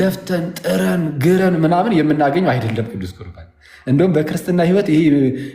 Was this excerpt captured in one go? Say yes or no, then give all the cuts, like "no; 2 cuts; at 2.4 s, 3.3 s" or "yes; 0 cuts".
yes; 0 cuts